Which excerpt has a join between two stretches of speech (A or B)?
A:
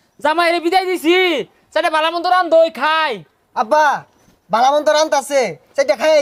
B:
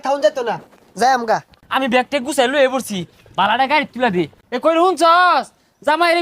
B